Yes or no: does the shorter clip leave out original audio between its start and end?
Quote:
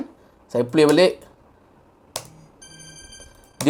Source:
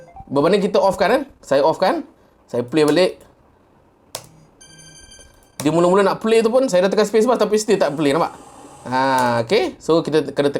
no